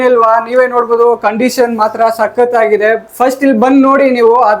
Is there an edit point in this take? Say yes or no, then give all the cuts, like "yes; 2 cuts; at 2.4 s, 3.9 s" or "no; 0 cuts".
no; 0 cuts